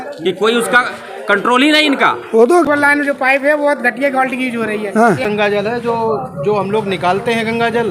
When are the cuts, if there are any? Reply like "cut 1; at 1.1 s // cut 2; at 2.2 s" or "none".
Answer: cut 1; at 2.7 s // cut 2; at 5.3 s